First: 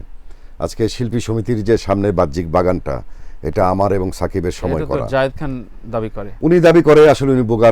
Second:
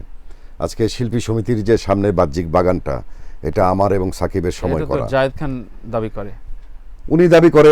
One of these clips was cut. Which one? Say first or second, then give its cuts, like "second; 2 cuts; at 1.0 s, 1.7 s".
first; 1 cut; at 6.2 s